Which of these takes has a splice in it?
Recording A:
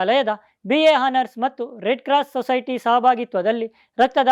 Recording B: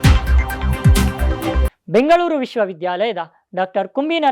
B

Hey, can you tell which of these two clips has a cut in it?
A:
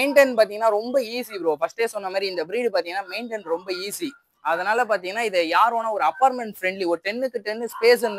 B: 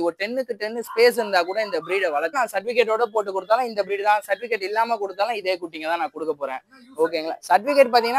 B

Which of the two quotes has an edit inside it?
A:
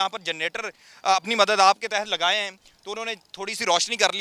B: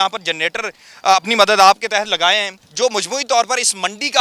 B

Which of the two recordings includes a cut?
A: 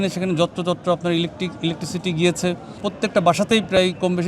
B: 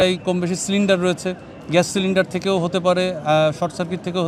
A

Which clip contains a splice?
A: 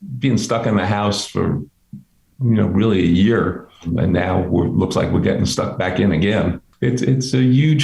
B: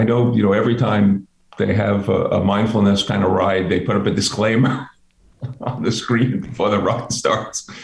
A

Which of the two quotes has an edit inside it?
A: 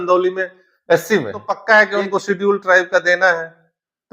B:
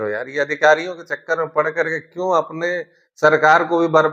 A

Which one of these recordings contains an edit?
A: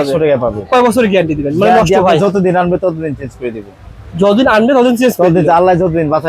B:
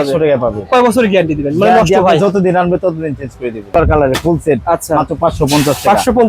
B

